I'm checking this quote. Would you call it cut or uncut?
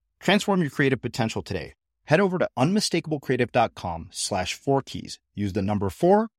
uncut